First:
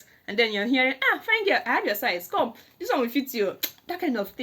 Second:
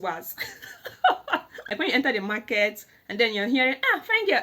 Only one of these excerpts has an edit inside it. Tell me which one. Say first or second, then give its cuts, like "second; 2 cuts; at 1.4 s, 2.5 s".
second; 1 cut; at 1.7 s